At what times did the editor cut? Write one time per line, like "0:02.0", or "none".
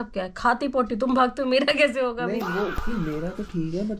none